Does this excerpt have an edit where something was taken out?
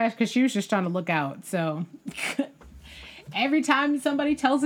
no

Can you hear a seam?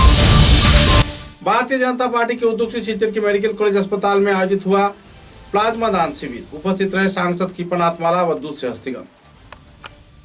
yes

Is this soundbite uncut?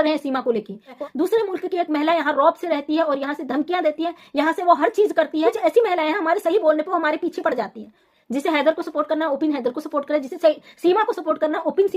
no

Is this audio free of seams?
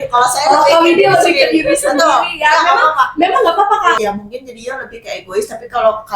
no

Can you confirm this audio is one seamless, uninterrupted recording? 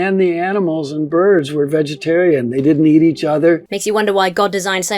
no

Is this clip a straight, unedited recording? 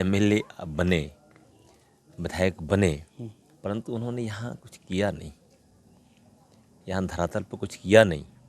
yes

